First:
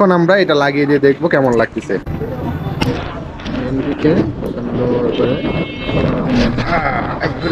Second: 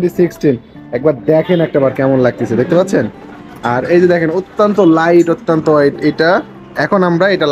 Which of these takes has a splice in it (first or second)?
first